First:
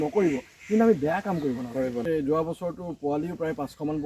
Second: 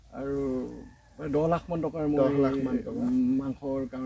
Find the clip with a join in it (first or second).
first